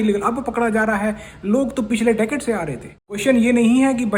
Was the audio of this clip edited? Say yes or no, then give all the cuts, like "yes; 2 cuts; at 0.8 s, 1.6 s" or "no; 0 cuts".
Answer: yes; 1 cut; at 3.0 s